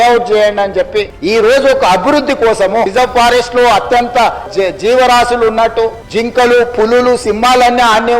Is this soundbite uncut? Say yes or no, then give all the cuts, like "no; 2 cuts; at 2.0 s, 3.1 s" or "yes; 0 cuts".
no; 2 cuts; at 2.9 s, 4.5 s